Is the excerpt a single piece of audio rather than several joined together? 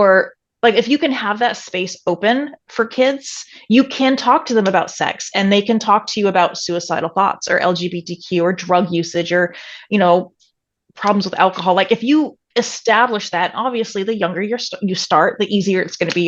yes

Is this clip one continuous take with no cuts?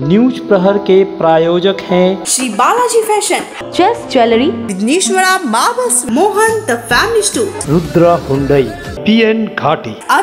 yes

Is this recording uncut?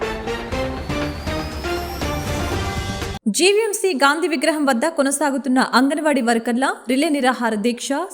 no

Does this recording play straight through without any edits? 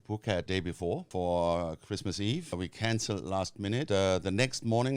no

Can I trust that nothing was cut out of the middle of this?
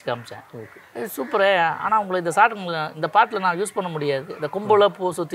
yes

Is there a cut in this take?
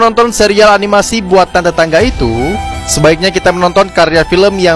no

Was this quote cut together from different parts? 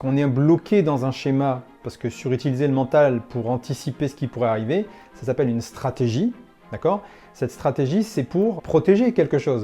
yes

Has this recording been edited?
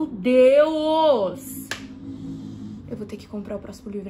no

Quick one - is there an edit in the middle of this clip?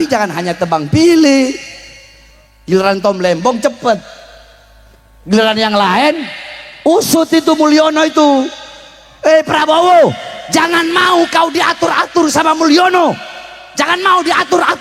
no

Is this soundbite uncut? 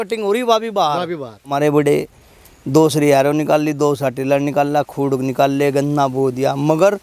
no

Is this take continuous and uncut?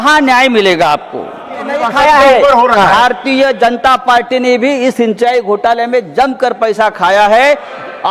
no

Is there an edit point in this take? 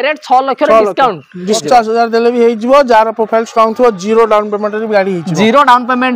yes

